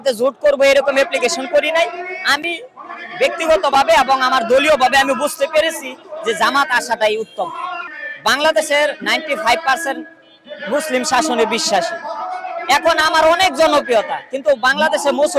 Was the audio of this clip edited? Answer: yes; 1 cut; at 7.8 s

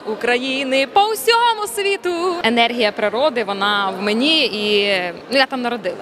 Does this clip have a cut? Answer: yes; 1 cut; at 2.4 s

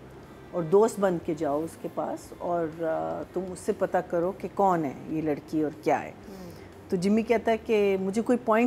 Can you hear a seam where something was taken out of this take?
no; 0 cuts

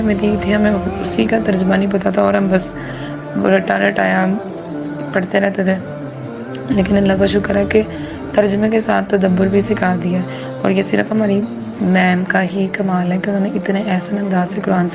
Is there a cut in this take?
no; 0 cuts

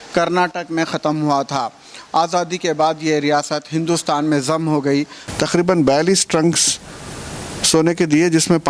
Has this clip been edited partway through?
yes; 1 cut; at 5.2 s

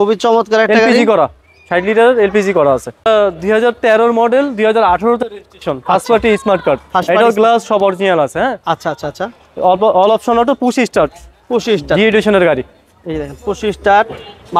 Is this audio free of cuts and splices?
no; 1 cut; at 3.0 s

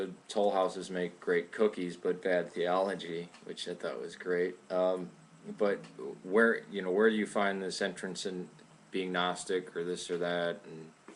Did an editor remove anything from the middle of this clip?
yes; 1 cut; at 1.5 s

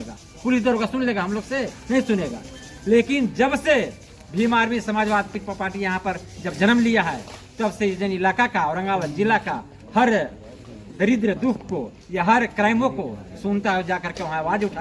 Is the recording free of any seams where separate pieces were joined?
yes; 0 cuts

